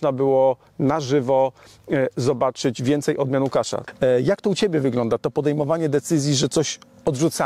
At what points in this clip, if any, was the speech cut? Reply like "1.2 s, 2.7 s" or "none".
3.8 s